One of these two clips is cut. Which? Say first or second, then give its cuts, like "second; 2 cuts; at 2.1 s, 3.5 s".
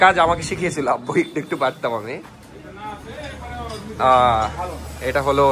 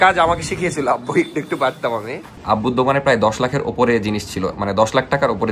second; 1 cut; at 2.4 s